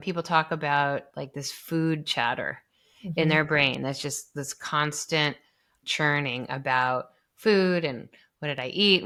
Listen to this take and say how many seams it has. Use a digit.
0